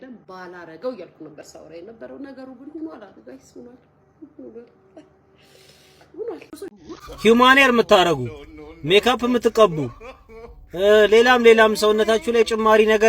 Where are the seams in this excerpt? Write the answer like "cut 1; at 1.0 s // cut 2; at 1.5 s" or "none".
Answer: cut 1; at 6.7 s